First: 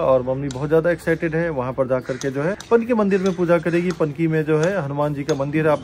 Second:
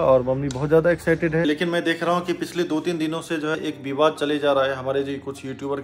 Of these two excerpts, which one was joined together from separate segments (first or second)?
second